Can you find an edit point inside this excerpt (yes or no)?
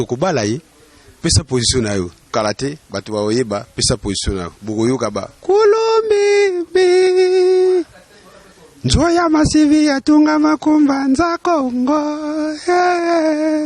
yes